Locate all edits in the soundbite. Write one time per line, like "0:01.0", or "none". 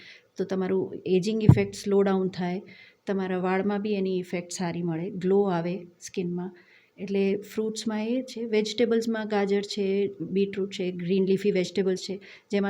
none

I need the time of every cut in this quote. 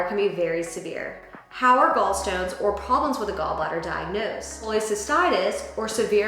0:04.6

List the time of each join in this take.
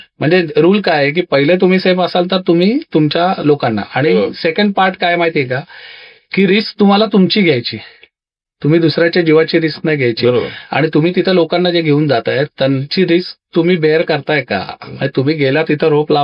none

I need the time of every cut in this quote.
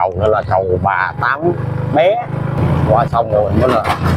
0:02.6

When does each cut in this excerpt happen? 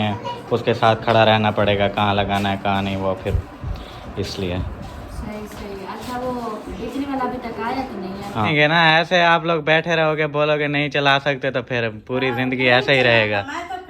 0:08.5

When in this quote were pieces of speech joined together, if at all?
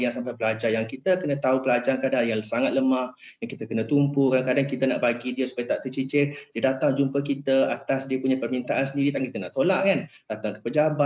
none

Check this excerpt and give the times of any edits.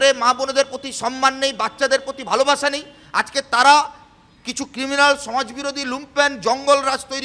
none

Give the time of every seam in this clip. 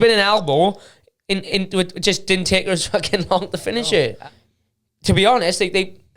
0:04.2

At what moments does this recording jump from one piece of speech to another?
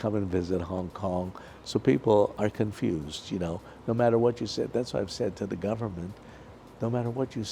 none

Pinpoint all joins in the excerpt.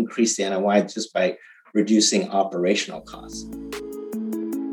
0:03.2

